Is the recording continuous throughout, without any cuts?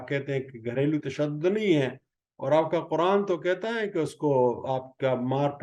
yes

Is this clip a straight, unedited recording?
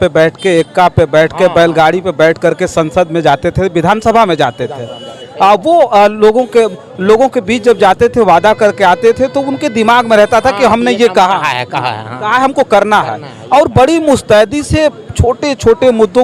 yes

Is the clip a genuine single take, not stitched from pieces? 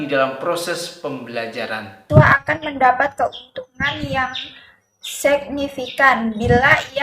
no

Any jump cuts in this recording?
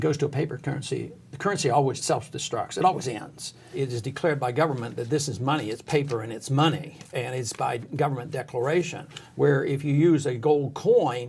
yes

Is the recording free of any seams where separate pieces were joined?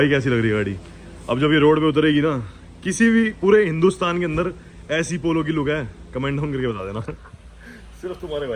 yes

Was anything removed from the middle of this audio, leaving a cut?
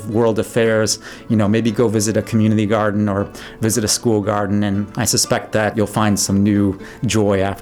yes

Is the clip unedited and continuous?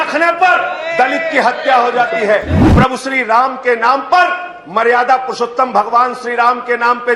no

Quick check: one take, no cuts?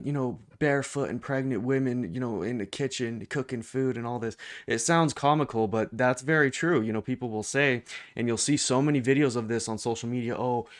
yes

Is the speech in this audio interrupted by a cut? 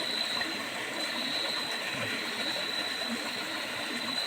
no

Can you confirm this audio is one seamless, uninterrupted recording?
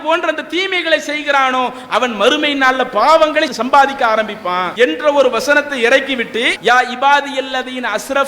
no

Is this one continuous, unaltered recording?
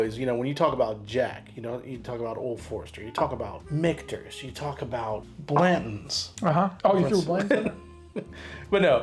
no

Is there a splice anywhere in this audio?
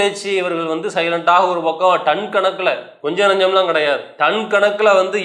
yes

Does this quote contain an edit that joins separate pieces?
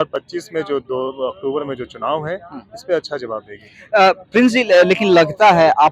no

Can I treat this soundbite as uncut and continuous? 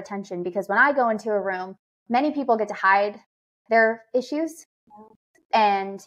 yes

